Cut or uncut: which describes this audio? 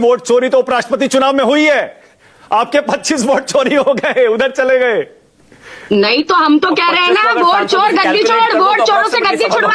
uncut